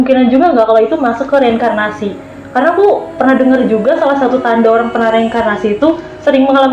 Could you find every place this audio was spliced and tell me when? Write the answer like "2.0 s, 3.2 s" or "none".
none

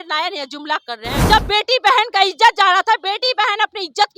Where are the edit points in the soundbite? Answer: 1.2 s

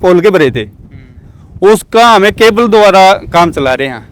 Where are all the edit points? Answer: none

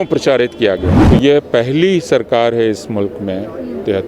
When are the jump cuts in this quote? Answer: 0.9 s

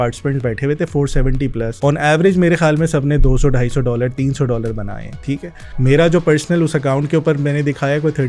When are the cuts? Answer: 1.7 s, 5.6 s

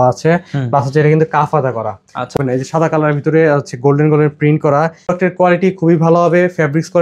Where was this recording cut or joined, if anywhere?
2.4 s, 5.1 s

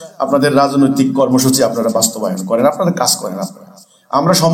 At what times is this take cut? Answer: none

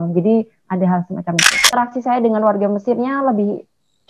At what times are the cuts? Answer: 1.8 s

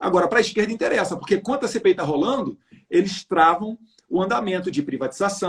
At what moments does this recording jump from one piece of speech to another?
none

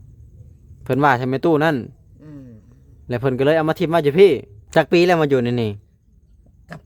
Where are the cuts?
4.6 s

